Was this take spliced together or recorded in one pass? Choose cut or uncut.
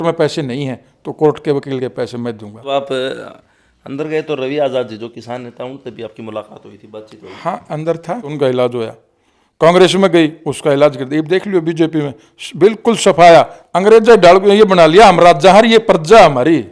cut